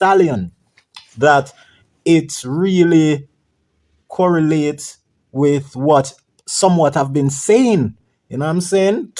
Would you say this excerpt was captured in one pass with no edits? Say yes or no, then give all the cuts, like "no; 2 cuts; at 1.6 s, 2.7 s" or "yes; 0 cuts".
yes; 0 cuts